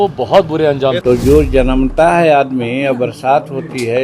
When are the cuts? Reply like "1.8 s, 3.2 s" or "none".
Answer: 1.0 s

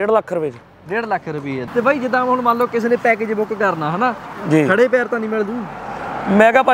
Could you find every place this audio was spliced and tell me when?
1.6 s

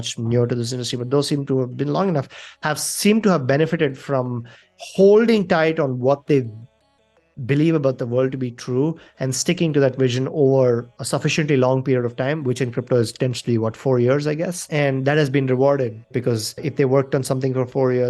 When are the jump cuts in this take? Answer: none

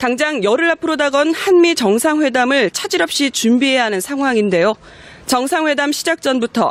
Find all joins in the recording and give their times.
none

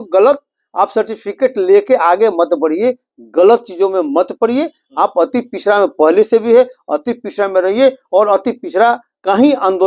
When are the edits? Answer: none

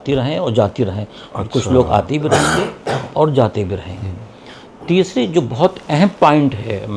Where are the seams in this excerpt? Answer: none

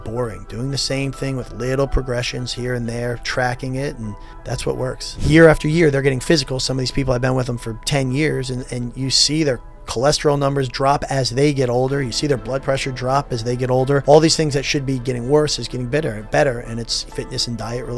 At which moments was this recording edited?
4.7 s, 14.0 s, 17.0 s

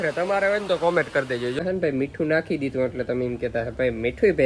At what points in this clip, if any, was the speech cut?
1.6 s

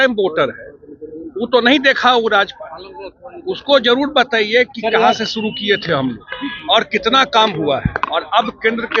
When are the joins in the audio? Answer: none

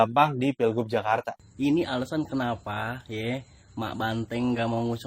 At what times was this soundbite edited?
1.4 s

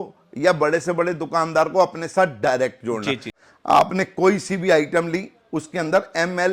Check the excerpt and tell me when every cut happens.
3.4 s

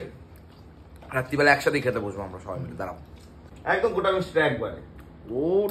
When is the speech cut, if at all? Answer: 3.4 s

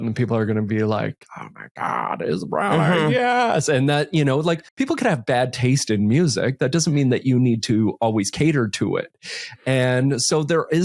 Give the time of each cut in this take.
4.7 s

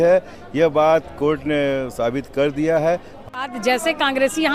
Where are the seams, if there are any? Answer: 3.3 s

